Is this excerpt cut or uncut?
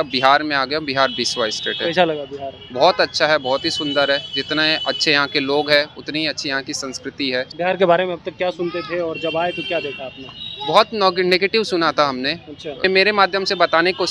cut